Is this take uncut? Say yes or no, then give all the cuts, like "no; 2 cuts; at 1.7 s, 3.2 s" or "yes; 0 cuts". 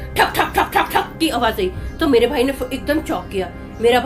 yes; 0 cuts